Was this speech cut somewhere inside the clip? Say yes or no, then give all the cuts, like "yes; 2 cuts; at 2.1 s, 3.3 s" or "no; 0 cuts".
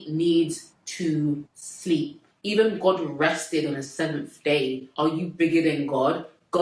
no; 0 cuts